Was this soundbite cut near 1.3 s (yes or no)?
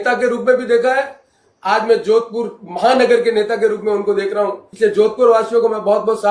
no